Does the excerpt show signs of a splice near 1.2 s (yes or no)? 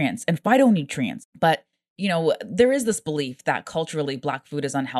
yes